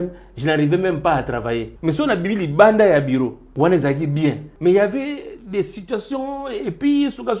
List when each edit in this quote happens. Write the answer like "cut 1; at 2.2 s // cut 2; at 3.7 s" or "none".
cut 1; at 1.7 s // cut 2; at 3.4 s // cut 3; at 4.5 s

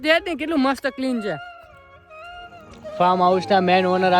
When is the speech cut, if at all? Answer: cut 1; at 3.0 s

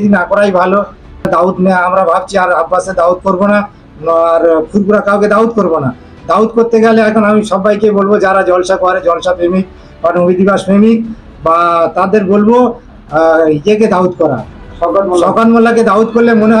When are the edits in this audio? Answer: cut 1; at 1.3 s

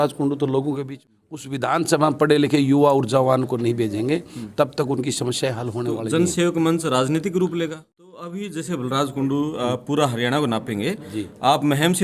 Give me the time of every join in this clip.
cut 1; at 0.9 s // cut 2; at 8.1 s

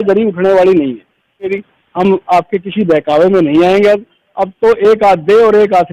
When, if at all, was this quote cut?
cut 1; at 1.5 s

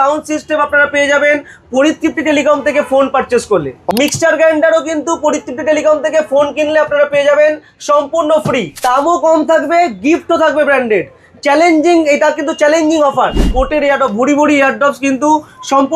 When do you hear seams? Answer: cut 1; at 3.9 s // cut 2; at 8.8 s // cut 3; at 13.5 s

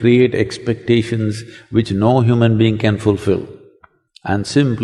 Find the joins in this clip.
none

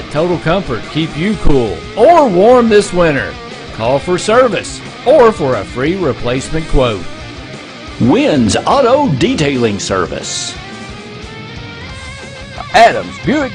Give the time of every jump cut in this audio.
none

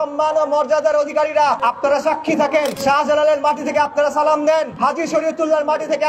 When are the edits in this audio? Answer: cut 1; at 1.6 s // cut 2; at 2.8 s // cut 3; at 4.7 s

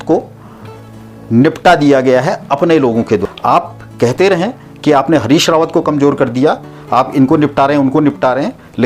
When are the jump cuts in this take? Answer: cut 1; at 3.2 s

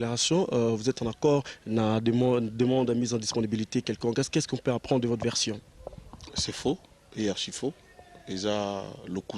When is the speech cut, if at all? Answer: none

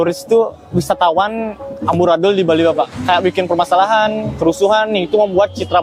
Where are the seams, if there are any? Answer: none

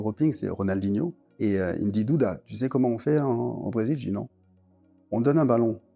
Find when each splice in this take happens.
cut 1; at 1.2 s

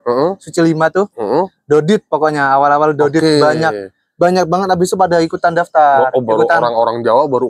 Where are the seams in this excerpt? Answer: none

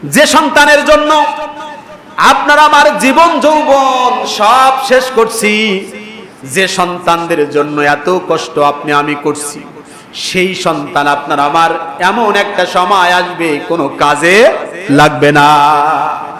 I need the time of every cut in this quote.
none

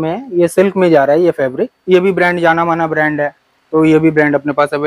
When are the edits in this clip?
cut 1; at 1.8 s

